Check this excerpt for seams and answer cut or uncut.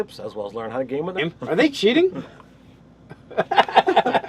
uncut